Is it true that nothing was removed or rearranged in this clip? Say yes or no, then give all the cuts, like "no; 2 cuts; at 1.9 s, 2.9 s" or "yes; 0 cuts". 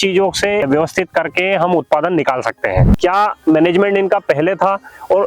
no; 1 cut; at 3.0 s